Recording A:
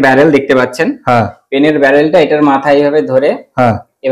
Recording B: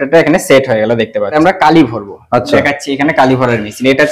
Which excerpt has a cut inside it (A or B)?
B